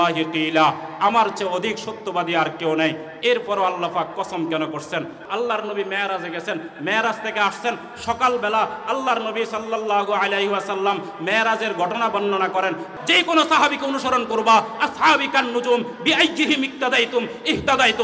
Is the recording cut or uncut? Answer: cut